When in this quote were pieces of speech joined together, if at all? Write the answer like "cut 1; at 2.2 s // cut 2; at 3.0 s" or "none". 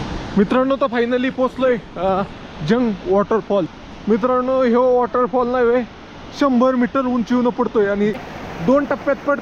cut 1; at 8.2 s